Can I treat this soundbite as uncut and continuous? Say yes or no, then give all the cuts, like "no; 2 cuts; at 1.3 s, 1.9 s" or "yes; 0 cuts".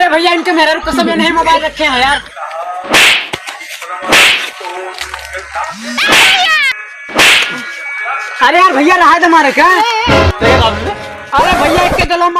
no; 2 cuts; at 2.3 s, 5.7 s